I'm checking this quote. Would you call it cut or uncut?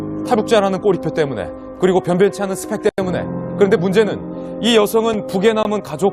cut